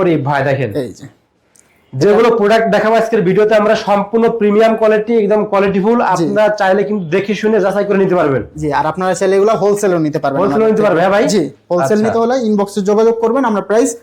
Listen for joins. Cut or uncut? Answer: uncut